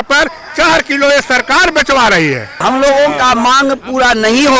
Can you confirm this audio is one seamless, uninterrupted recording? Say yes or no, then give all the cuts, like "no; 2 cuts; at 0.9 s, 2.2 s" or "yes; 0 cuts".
no; 1 cut; at 2.6 s